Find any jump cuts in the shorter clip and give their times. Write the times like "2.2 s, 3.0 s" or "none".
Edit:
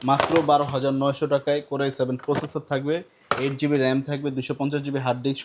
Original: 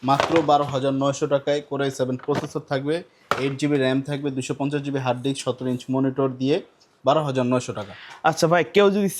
none